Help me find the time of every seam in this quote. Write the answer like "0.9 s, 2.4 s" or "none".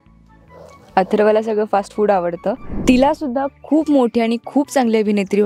2.7 s